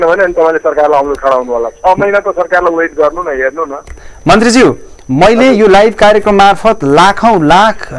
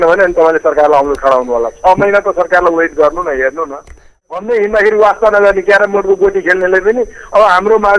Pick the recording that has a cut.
second; 1 cut; at 4.1 s

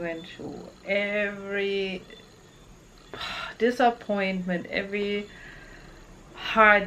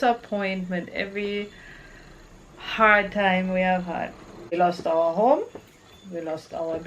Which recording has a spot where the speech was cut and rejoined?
second; 1 cut; at 4.6 s

